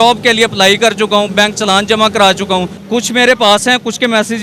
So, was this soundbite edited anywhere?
yes; 1 cut; at 2.8 s

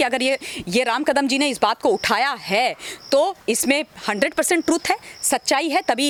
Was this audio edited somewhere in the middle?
no; 0 cuts

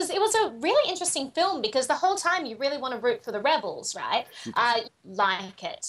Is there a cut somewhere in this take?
no; 0 cuts

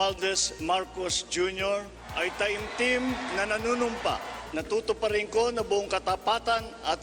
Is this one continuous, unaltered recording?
no; 2 cuts; at 2.0 s, 4.4 s

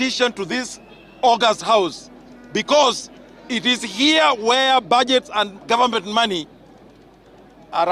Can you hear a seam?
no; 0 cuts

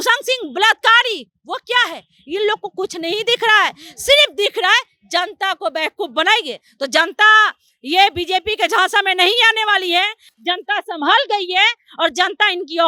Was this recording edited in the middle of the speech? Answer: no; 0 cuts

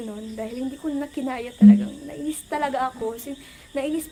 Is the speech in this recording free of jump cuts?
yes; 0 cuts

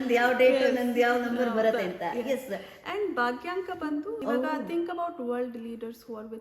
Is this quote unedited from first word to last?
no; 1 cut; at 4.2 s

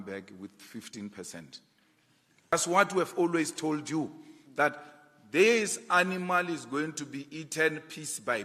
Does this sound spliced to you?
yes; 1 cut; at 2.5 s

